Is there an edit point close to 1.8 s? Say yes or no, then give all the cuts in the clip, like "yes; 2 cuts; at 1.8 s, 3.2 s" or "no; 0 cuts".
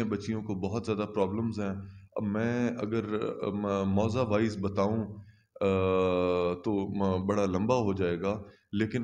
no; 0 cuts